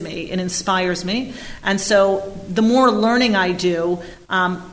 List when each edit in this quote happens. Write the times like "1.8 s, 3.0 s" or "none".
none